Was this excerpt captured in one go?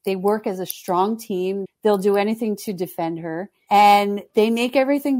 no; 3 cuts; at 1.7 s, 3.5 s, 4.2 s

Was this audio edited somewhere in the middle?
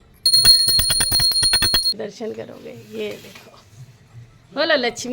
yes; 1 cut; at 1.9 s

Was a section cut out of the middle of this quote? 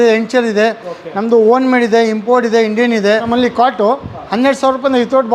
yes; 1 cut; at 3.3 s

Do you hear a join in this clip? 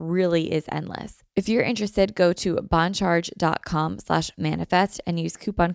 yes; 1 cut; at 1.2 s

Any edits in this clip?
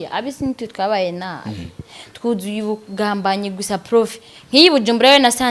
no; 0 cuts

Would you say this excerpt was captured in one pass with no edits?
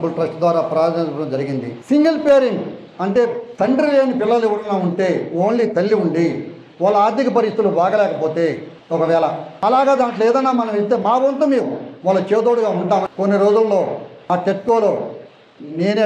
no; 3 cuts; at 1.7 s, 8.9 s, 13.1 s

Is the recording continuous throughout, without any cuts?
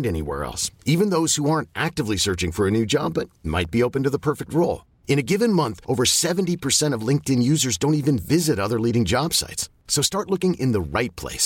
yes; 0 cuts

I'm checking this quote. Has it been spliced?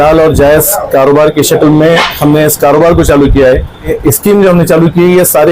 yes; 1 cut; at 3.9 s

